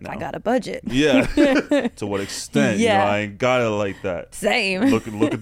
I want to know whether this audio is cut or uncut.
cut